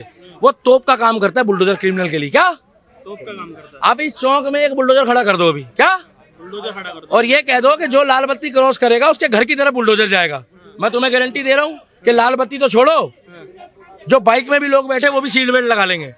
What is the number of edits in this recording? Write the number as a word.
zero